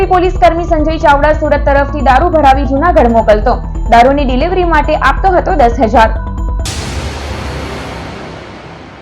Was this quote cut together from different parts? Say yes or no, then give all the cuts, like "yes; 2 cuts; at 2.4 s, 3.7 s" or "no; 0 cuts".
yes; 1 cut; at 6.7 s